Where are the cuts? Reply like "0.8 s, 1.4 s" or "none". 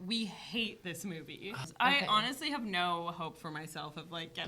1.6 s